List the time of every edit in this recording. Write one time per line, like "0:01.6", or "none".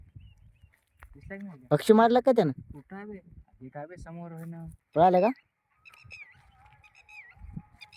0:04.8